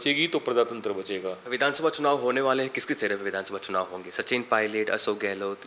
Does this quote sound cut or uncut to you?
cut